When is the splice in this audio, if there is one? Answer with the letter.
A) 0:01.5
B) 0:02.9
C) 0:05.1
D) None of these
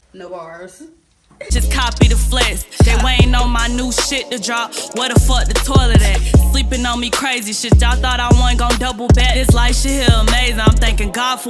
A